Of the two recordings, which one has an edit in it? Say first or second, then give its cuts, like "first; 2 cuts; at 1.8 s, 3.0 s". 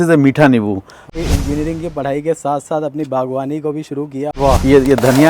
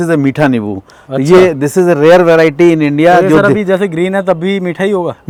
first; 2 cuts; at 1.1 s, 4.4 s